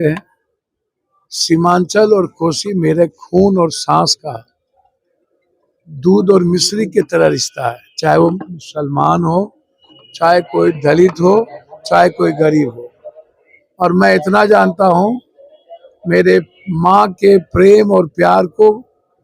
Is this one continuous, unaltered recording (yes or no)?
yes